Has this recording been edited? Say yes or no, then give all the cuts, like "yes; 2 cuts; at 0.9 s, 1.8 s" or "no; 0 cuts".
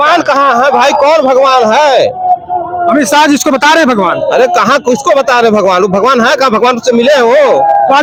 no; 0 cuts